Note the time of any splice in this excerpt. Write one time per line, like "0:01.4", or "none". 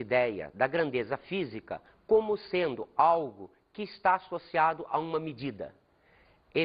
0:05.0